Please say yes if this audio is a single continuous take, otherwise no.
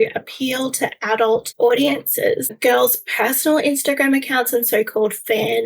no